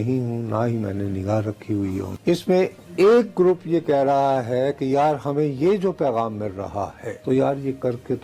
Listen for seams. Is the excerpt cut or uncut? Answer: cut